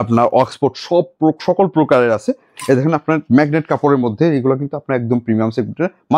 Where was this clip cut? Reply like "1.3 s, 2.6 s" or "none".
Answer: none

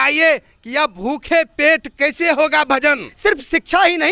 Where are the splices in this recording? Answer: 3.1 s

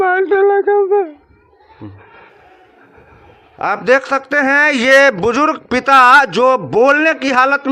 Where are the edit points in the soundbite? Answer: none

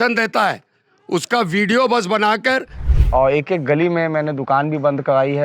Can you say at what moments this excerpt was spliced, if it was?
2.8 s

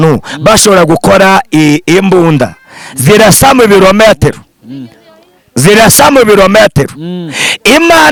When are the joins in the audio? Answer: none

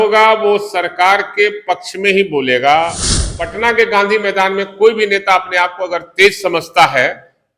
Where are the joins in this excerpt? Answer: 3.0 s

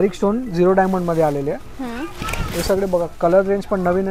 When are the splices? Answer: none

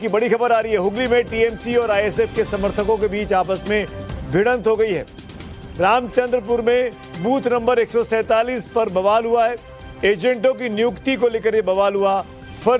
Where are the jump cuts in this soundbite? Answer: 2.1 s

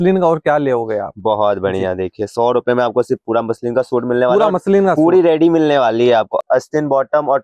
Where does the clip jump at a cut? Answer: none

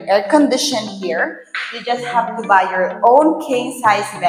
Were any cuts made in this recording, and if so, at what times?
none

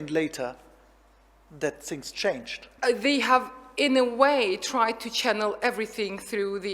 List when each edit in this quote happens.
2.7 s

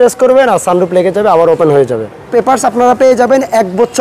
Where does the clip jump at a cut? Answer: 2.2 s

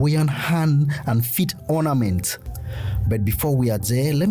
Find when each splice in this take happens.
2.5 s

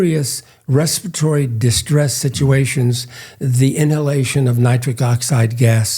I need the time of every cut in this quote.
none

